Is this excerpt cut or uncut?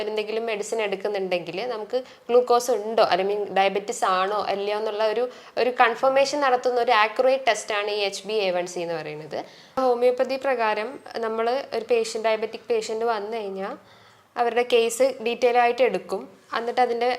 cut